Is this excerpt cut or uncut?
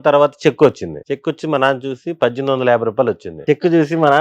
cut